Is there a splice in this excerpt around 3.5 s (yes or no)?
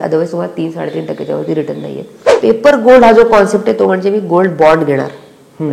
no